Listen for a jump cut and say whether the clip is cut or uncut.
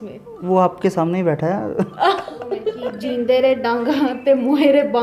cut